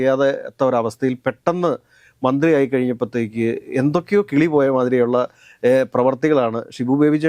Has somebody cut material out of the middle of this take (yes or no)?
no